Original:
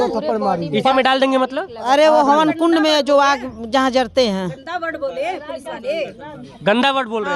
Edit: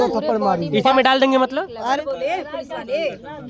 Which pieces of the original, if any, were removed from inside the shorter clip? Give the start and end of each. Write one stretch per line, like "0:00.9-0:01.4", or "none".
0:01.8-0:04.8